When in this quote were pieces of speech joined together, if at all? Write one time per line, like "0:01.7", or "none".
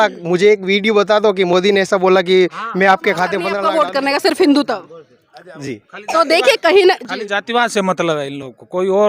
0:03.5